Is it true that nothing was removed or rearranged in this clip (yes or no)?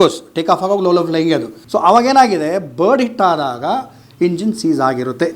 no